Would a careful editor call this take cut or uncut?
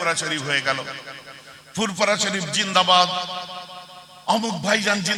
uncut